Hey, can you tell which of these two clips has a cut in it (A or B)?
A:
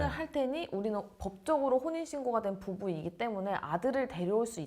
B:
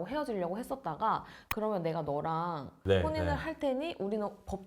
B